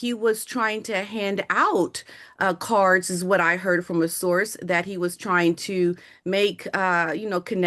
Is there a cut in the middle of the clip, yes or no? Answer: no